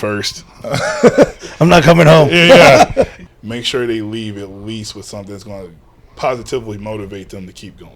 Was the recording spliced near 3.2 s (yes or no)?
yes